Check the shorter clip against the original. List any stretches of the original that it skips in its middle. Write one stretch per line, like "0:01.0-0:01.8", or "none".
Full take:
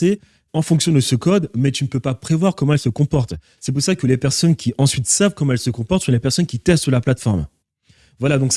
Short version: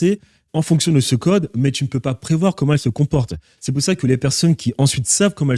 none